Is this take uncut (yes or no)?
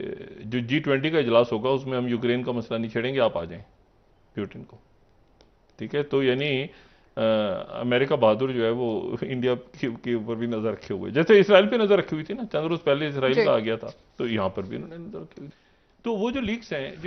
yes